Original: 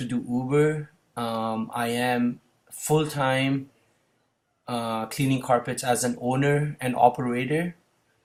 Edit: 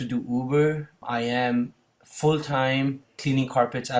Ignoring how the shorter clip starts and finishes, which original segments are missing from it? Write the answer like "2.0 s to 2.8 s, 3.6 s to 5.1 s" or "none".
1.0 s to 1.7 s, 3.8 s to 5.1 s